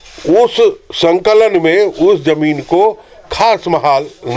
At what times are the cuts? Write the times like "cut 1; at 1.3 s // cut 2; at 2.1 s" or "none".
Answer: none